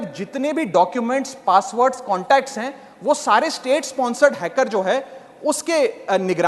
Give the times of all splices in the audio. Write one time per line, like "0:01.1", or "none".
none